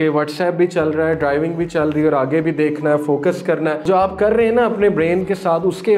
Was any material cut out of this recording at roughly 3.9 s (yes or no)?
yes